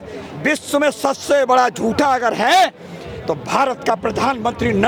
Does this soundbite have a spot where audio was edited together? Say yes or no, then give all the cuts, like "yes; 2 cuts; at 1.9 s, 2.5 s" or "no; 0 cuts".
no; 0 cuts